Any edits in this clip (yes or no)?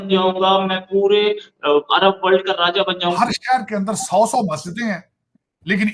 yes